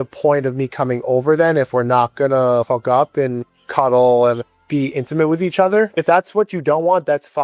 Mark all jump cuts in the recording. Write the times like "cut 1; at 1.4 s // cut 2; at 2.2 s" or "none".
cut 1; at 2.6 s // cut 2; at 3.4 s // cut 3; at 4.4 s // cut 4; at 5.9 s